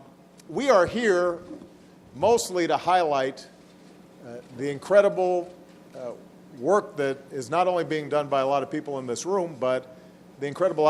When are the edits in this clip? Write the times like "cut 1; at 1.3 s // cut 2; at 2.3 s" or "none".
none